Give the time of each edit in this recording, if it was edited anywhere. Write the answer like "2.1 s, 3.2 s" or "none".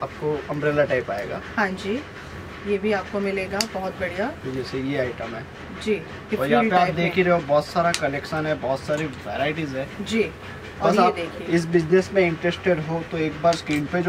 none